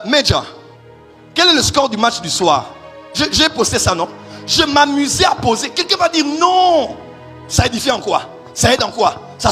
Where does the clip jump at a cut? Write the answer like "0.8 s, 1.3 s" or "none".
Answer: none